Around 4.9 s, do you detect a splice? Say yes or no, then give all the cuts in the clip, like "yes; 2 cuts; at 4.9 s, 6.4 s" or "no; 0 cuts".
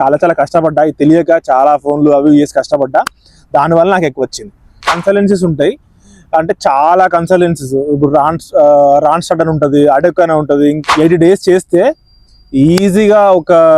yes; 2 cuts; at 4.9 s, 10.8 s